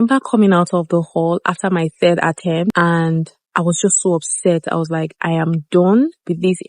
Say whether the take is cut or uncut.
cut